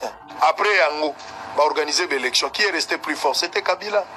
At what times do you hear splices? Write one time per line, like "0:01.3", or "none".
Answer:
none